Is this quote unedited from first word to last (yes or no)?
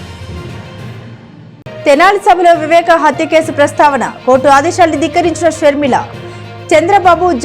no